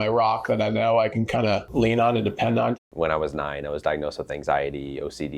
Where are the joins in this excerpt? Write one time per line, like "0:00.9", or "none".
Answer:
0:01.7
0:02.8